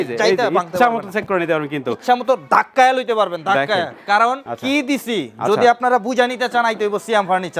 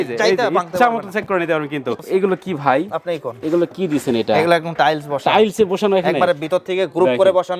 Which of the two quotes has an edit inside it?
second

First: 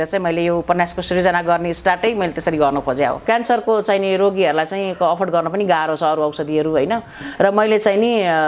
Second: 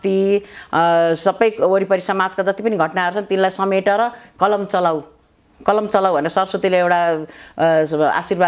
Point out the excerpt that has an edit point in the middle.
first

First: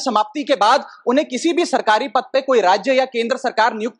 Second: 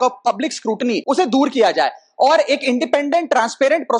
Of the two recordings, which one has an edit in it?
second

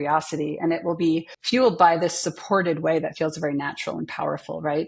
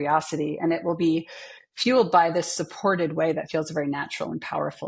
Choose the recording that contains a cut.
first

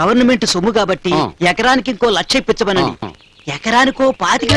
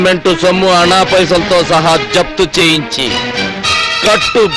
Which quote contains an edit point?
first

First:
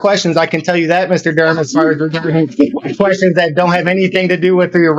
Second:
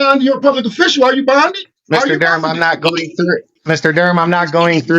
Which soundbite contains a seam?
second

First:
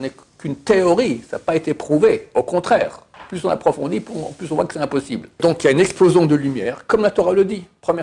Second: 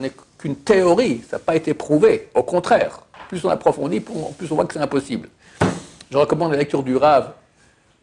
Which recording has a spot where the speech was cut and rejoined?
first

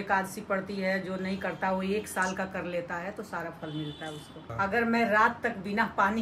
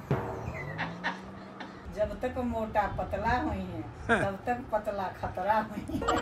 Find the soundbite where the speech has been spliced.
first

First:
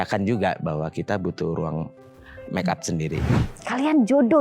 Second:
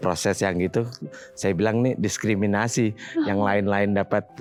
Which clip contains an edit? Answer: first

